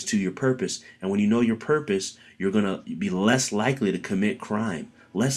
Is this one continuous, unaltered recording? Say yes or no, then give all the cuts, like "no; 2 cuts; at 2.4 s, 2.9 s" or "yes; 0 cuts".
yes; 0 cuts